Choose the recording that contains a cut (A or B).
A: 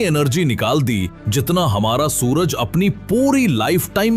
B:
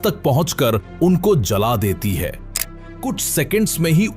B